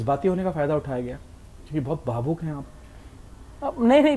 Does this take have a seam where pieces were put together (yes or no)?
no